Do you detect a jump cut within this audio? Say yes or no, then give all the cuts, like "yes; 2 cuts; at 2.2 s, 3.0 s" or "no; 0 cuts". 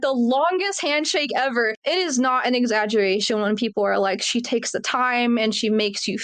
yes; 1 cut; at 1.7 s